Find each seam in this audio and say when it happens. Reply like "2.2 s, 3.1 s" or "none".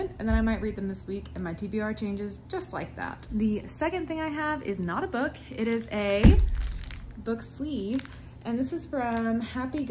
none